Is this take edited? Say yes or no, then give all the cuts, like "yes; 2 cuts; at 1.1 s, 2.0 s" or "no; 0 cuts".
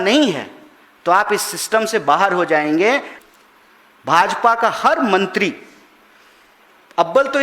yes; 1 cut; at 3.1 s